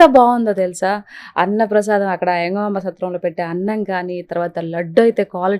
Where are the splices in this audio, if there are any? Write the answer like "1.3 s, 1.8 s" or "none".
none